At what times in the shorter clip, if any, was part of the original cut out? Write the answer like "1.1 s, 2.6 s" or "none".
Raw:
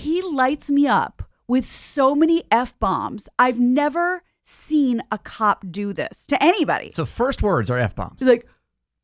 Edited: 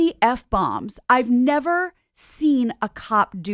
none